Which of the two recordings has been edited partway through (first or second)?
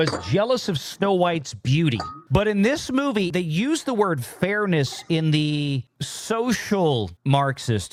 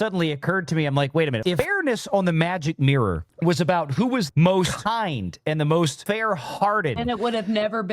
second